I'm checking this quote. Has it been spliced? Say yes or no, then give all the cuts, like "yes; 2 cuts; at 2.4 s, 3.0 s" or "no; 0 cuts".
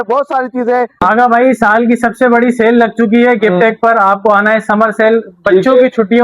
yes; 1 cut; at 1.0 s